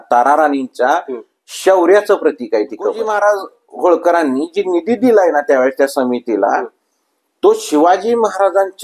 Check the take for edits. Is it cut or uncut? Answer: cut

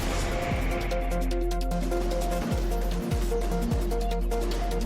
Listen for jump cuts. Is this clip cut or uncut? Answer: cut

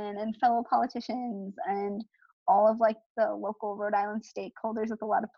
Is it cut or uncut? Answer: uncut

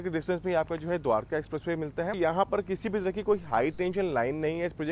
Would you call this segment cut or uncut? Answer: cut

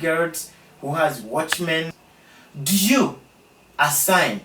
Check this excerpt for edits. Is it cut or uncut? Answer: cut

